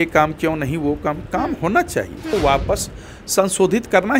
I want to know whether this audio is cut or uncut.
cut